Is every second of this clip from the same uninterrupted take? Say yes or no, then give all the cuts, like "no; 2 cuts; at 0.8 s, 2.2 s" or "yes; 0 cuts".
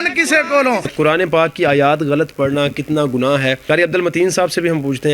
no; 2 cuts; at 0.9 s, 3.6 s